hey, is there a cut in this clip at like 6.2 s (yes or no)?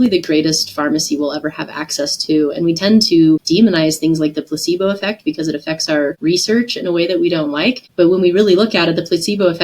yes